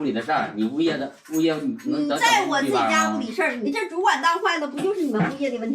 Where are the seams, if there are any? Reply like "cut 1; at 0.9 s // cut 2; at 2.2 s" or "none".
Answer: cut 1; at 3.6 s

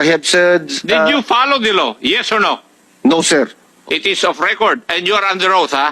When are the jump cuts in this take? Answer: cut 1; at 3.7 s

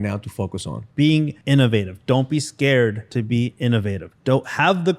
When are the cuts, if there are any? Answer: cut 1; at 1.3 s // cut 2; at 3.0 s // cut 3; at 4.1 s

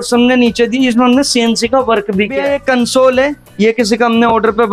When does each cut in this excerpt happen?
cut 1; at 2.3 s

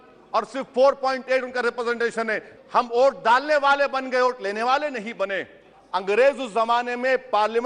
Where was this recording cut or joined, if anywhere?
cut 1; at 2.5 s // cut 2; at 5.7 s

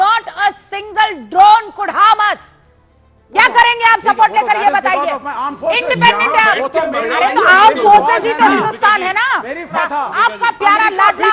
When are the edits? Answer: cut 1; at 4.9 s // cut 2; at 9.7 s

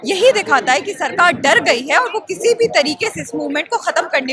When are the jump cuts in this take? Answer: none

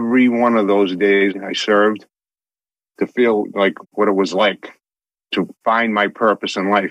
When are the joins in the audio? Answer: cut 1; at 1.3 s // cut 2; at 5.3 s

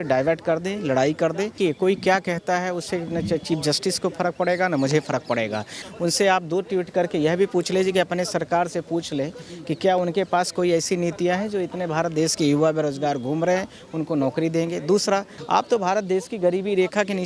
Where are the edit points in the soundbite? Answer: cut 1; at 1.5 s // cut 2; at 5.8 s // cut 3; at 15.3 s

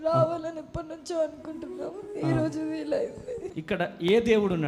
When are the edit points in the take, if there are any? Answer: cut 1; at 3.5 s

